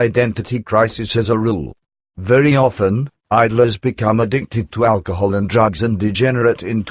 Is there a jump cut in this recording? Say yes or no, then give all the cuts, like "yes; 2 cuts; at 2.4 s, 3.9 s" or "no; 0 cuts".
yes; 1 cut; at 5.8 s